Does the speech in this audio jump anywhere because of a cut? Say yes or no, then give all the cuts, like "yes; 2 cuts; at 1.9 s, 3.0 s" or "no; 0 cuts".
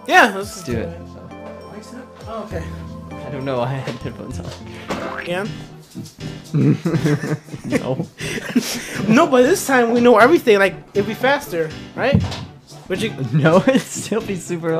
no; 0 cuts